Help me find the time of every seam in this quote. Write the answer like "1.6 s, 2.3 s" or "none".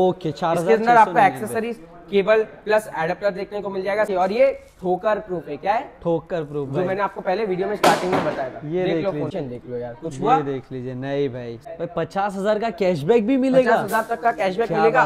4.1 s, 9.3 s, 11.5 s